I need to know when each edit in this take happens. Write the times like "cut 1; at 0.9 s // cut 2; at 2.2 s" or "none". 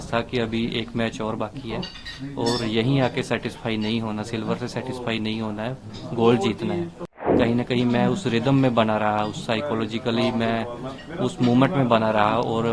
cut 1; at 7.3 s